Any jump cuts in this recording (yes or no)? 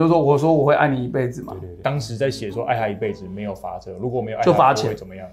yes